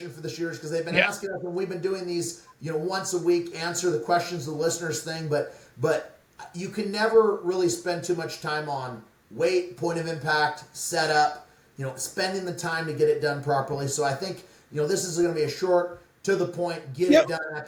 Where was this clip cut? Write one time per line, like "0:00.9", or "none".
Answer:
none